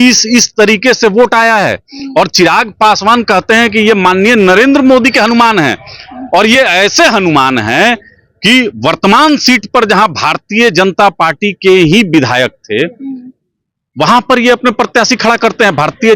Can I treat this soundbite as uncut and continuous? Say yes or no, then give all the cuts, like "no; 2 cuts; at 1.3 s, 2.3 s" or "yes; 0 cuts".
yes; 0 cuts